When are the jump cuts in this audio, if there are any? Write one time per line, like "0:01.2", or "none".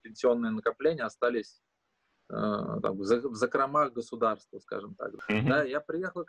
0:05.0